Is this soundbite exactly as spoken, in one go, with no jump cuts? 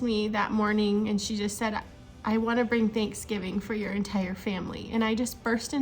yes; 0 cuts

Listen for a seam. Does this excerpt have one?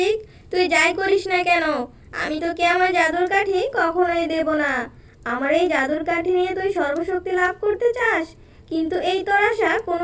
no; 0 cuts

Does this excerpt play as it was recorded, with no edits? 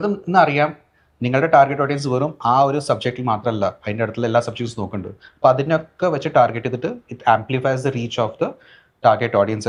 yes; 0 cuts

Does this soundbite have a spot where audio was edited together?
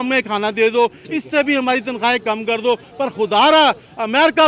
no; 0 cuts

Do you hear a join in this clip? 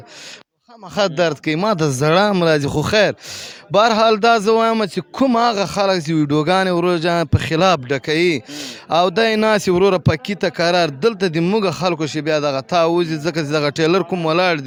no; 0 cuts

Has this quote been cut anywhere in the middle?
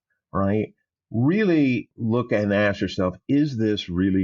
yes; 1 cut; at 1.9 s

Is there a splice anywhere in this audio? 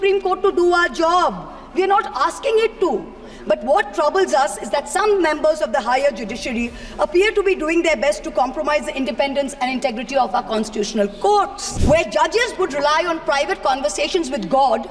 yes; 1 cut; at 11.6 s

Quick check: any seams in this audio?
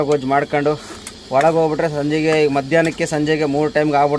no; 0 cuts

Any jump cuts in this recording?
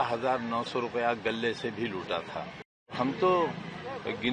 yes; 1 cut; at 2.9 s

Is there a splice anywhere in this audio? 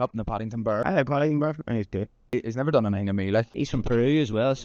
no; 0 cuts

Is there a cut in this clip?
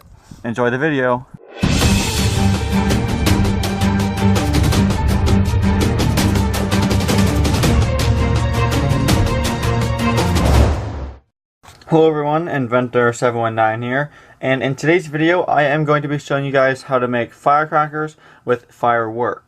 yes; 1 cut; at 12.2 s

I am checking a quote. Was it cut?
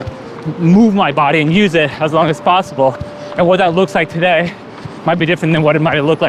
no; 0 cuts

